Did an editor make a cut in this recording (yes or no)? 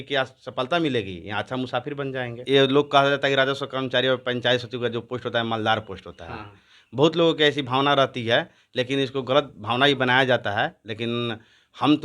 yes